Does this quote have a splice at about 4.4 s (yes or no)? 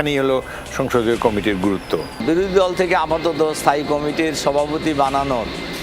no